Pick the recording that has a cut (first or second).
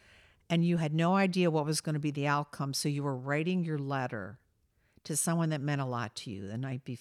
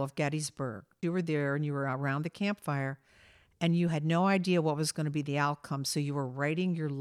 second